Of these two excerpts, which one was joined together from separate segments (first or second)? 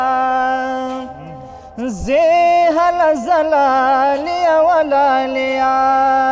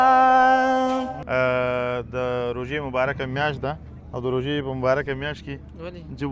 second